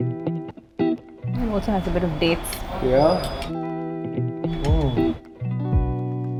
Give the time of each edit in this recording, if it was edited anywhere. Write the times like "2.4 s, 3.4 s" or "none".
none